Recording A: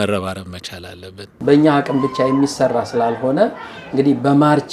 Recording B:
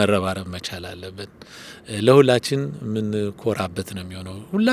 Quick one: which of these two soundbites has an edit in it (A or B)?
A